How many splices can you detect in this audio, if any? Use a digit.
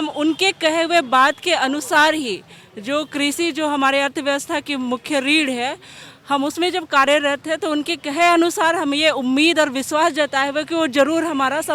0